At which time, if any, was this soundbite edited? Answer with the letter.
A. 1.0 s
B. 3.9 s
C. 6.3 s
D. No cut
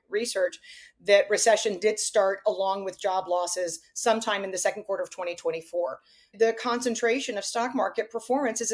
C